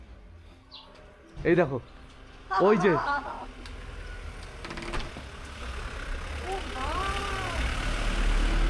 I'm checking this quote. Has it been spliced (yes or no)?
no